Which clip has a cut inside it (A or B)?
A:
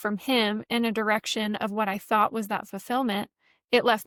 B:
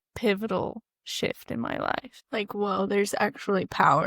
B